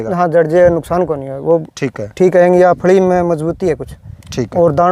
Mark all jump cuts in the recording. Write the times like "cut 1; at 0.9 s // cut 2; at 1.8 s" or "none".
none

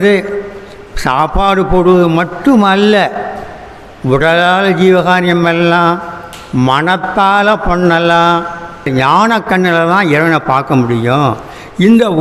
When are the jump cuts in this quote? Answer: cut 1; at 8.9 s

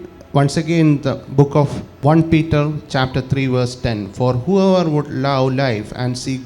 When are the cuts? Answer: cut 1; at 1.8 s

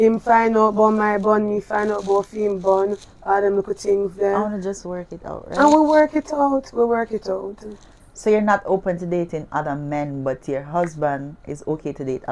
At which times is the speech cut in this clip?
cut 1; at 8.0 s

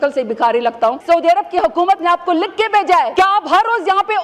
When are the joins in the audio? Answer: cut 1; at 1.0 s // cut 2; at 3.1 s

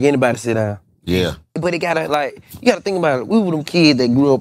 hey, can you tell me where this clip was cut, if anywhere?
cut 1; at 1.5 s

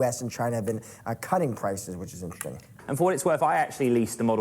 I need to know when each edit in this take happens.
cut 1; at 2.7 s

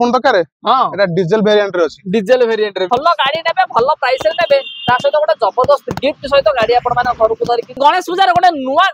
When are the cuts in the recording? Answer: cut 1; at 2.9 s // cut 2; at 7.8 s

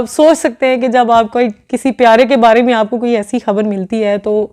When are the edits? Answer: none

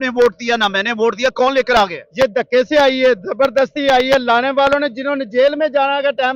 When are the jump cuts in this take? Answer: none

